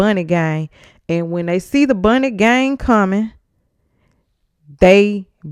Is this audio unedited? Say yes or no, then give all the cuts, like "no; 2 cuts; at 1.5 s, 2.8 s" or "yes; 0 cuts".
yes; 0 cuts